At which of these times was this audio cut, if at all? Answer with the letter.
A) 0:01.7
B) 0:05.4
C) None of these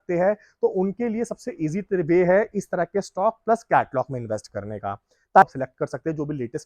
B